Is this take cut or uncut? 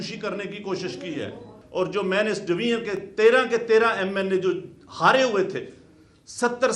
cut